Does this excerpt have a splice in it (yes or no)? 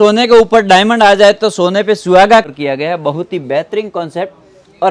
yes